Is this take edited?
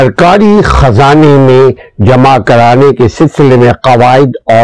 no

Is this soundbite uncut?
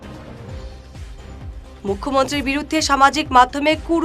yes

